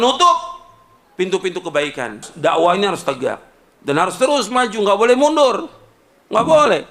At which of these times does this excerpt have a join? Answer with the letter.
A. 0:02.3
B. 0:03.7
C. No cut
A